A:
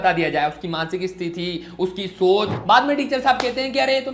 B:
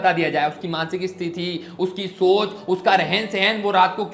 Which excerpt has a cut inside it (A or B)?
A